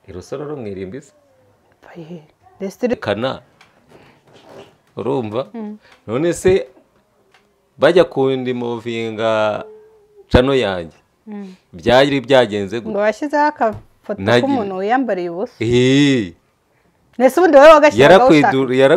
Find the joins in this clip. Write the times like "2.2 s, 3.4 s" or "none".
2.9 s